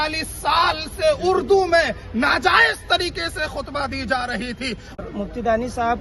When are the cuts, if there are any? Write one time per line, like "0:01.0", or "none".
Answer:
0:05.0